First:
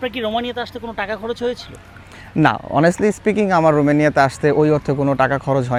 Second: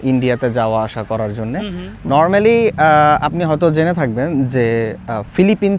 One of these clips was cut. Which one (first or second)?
second